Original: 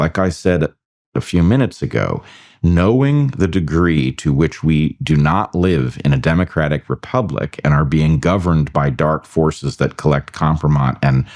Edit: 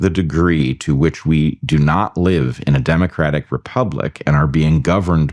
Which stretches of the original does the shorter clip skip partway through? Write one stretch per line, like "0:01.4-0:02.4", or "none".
none